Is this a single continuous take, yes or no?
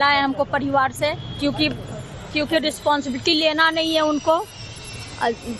no